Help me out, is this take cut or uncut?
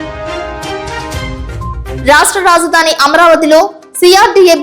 cut